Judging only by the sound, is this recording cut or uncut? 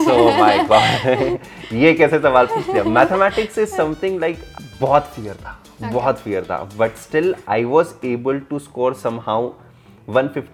uncut